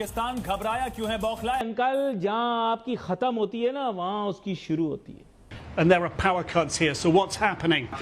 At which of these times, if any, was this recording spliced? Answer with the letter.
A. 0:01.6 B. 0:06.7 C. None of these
A